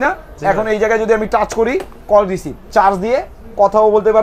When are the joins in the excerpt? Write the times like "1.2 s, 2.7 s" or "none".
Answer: 2.5 s